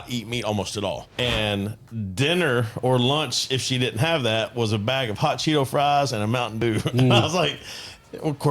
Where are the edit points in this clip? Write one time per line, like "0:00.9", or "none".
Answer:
0:01.1